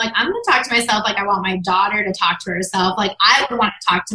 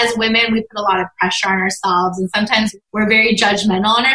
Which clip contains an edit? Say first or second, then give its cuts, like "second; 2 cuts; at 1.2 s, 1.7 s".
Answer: second; 1 cut; at 2.8 s